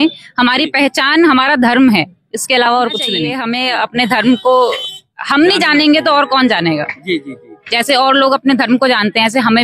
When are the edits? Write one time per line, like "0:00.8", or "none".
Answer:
0:03.3

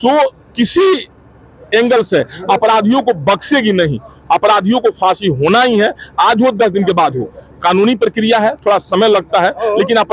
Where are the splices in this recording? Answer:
none

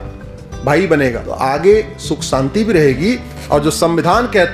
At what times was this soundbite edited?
0:01.3

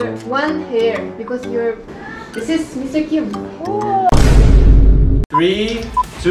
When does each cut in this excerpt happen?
0:05.2

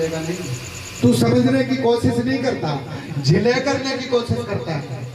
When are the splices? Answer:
0:00.9

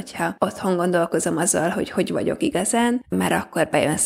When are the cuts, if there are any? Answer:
0:03.1

